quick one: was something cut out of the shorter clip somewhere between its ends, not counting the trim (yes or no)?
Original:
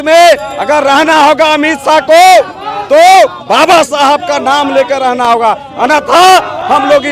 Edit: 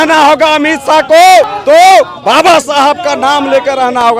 yes